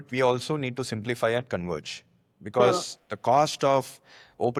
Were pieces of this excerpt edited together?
no; 0 cuts

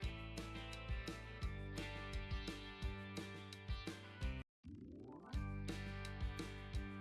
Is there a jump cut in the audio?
no; 0 cuts

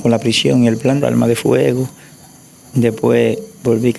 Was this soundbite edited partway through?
yes; 1 cut; at 1.0 s

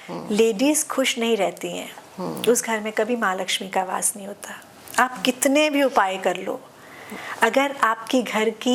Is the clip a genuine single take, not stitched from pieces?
yes; 0 cuts

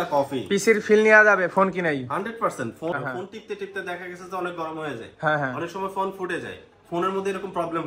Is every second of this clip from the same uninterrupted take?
no; 1 cut; at 2.9 s

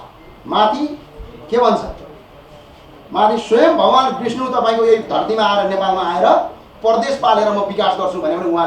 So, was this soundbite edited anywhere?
no; 0 cuts

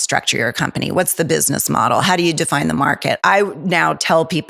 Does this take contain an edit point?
yes; 1 cut; at 3.2 s

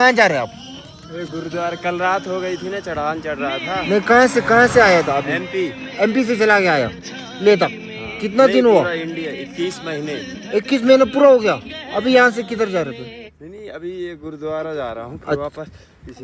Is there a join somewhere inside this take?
no; 0 cuts

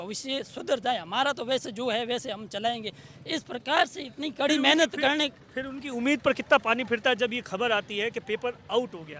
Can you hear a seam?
no; 0 cuts

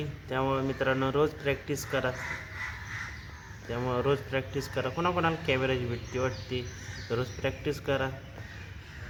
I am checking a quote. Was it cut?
no; 0 cuts

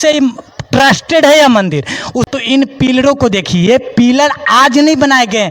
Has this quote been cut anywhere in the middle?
yes; 1 cut; at 2.2 s

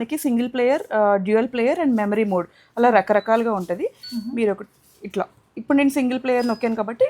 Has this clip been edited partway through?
no; 0 cuts

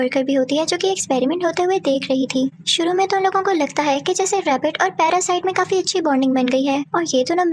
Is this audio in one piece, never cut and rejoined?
yes; 0 cuts

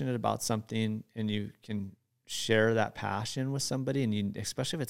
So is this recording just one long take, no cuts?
yes; 0 cuts

